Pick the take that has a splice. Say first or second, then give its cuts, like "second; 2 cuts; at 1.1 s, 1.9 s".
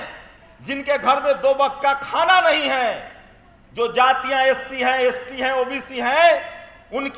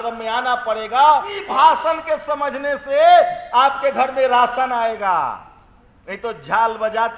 second; 1 cut; at 1.4 s